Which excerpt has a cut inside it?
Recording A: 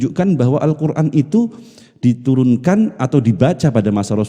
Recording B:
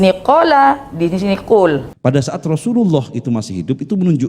B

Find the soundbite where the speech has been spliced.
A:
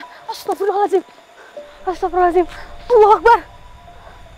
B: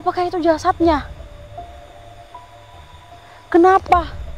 B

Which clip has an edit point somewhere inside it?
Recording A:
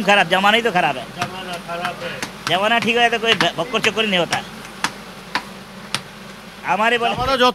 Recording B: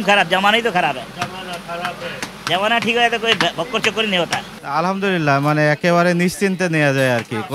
B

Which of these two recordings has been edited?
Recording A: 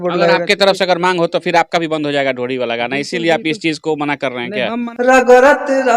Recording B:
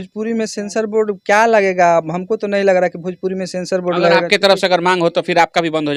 A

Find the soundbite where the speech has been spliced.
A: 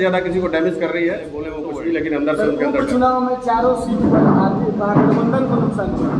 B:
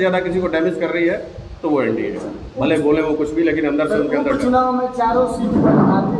A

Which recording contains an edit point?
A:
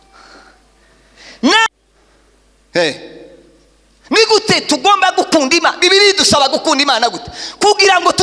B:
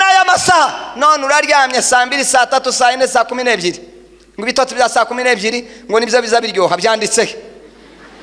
A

